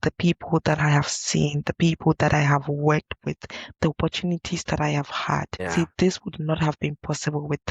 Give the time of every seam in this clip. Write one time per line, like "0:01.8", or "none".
0:05.7